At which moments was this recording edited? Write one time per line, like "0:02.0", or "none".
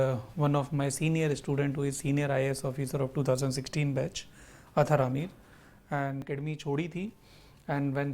0:06.2

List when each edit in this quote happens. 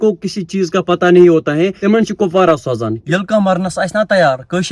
0:03.0

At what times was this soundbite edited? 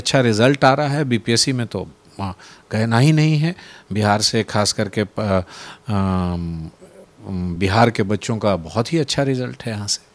none

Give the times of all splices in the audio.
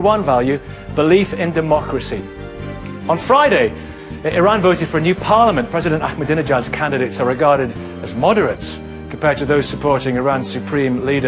0:04.6

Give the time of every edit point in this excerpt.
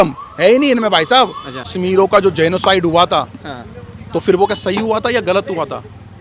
0:01.6

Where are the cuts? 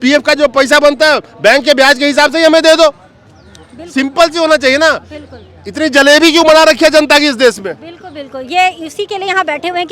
none

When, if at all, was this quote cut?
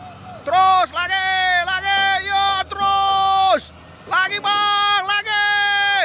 none

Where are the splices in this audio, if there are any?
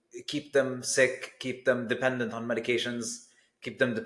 none

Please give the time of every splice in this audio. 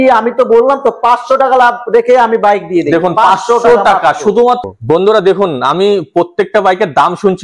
0:04.6

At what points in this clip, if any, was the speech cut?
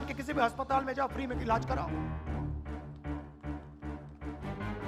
0:01.8

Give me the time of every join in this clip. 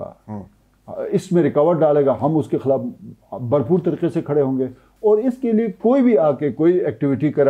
none

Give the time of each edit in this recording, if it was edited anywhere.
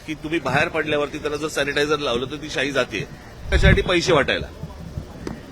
0:03.5

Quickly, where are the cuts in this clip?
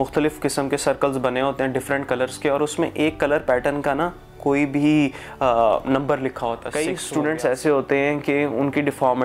0:06.7

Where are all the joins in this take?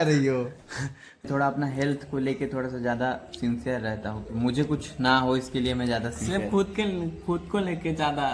0:01.3

